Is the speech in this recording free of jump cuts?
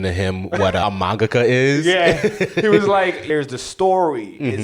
no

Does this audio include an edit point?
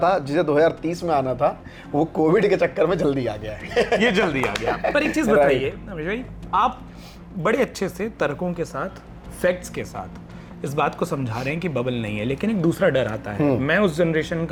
no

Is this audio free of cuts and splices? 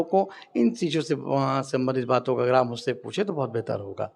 yes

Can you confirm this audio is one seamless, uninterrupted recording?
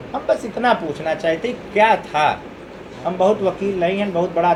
yes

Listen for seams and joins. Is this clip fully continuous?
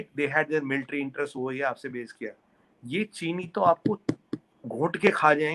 yes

